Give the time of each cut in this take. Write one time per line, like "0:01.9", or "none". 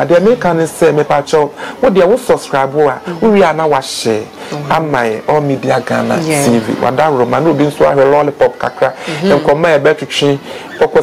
none

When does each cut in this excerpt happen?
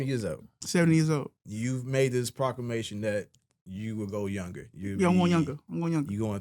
0:01.4

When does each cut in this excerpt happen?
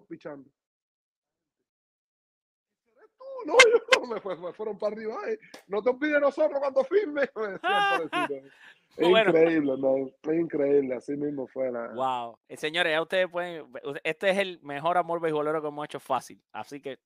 none

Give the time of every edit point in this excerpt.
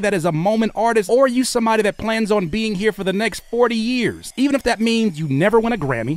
0:01.1
0:04.2

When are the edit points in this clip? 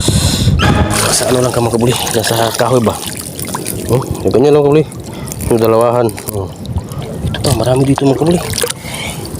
0:00.9
0:07.0

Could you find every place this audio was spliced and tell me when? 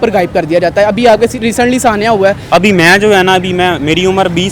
0:02.5

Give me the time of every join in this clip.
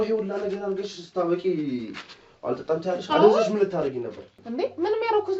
0:04.4

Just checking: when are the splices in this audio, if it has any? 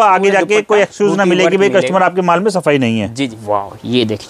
0:03.4

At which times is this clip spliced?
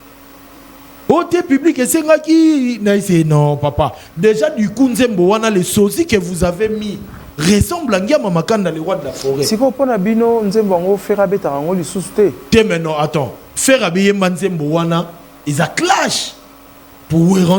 none

